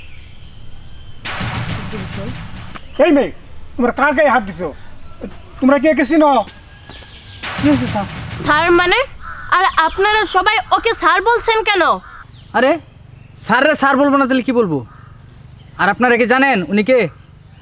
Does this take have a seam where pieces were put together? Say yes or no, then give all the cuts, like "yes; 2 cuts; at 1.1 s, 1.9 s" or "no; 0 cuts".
yes; 1 cut; at 6.6 s